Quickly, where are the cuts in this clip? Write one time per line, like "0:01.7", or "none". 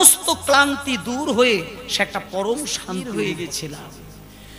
0:02.9